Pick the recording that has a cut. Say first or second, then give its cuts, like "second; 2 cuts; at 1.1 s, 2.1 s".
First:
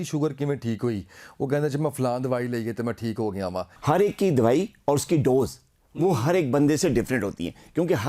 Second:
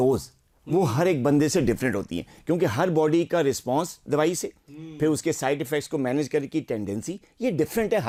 first; 1 cut; at 3.7 s